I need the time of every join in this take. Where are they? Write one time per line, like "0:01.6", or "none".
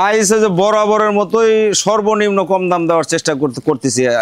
none